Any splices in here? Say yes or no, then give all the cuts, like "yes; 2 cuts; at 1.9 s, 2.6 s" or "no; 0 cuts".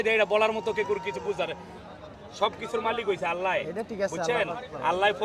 no; 0 cuts